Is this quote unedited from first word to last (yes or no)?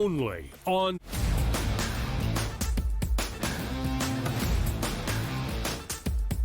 no